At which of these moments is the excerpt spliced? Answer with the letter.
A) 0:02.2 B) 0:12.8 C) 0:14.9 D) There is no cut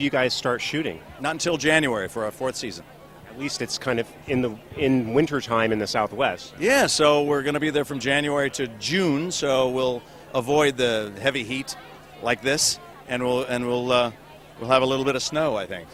D